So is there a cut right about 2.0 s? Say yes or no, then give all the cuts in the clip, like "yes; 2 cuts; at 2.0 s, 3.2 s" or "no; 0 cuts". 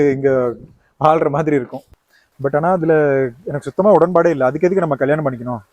yes; 1 cut; at 2.0 s